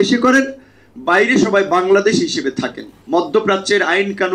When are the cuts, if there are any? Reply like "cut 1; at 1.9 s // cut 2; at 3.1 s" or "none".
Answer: cut 1; at 3.0 s